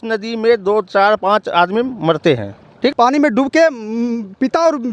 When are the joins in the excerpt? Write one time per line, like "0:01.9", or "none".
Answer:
0:02.9